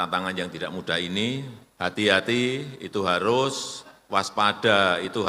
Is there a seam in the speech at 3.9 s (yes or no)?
no